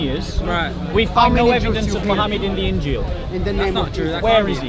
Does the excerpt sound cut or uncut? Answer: uncut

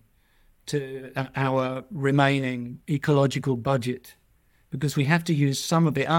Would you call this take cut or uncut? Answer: cut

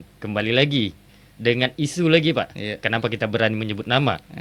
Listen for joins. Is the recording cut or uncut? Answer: uncut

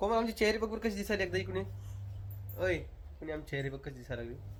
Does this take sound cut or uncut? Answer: uncut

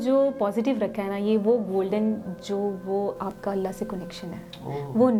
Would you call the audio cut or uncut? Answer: uncut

